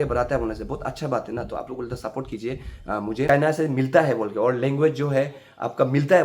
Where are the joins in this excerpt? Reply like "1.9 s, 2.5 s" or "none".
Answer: 3.4 s